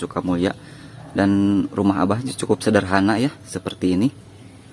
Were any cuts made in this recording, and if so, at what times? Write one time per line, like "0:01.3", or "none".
none